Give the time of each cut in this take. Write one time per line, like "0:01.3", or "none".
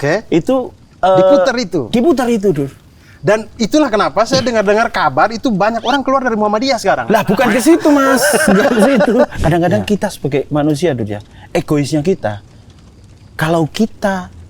0:09.3